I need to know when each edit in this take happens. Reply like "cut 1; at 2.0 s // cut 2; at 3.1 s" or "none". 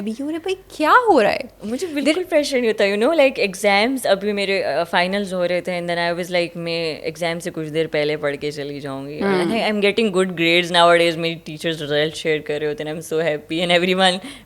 none